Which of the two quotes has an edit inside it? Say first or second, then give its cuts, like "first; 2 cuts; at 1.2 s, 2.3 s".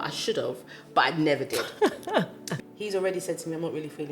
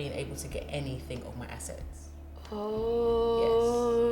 first; 1 cut; at 2.4 s